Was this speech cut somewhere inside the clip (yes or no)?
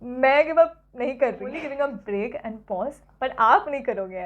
yes